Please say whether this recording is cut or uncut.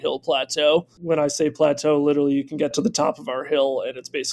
uncut